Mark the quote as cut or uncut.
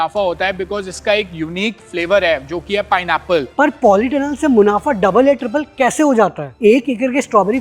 cut